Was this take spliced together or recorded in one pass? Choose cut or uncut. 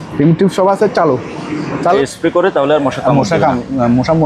cut